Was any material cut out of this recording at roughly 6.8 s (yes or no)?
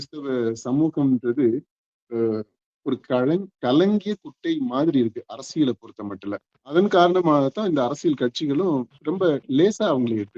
yes